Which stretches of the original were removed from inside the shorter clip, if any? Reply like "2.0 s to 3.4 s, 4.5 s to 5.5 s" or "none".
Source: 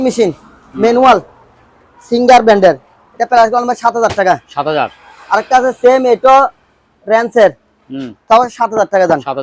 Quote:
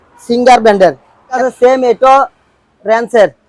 3.2 s to 5.6 s